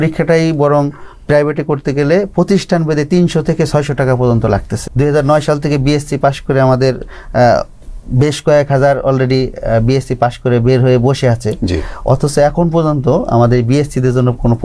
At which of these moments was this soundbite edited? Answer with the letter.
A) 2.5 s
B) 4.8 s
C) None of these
B